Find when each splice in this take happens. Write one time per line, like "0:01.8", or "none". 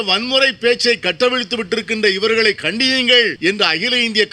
0:03.3